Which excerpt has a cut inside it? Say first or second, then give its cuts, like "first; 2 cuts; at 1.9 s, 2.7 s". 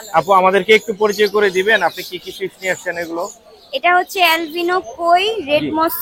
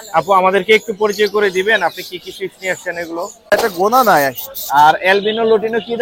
second; 1 cut; at 3.5 s